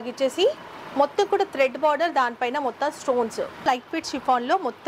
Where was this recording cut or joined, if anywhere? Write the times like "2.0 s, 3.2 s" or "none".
3.7 s